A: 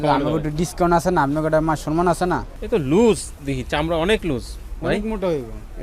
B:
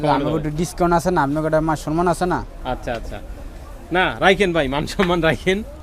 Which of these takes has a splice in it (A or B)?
A